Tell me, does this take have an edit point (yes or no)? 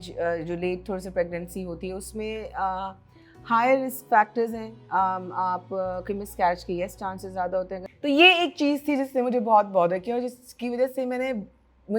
yes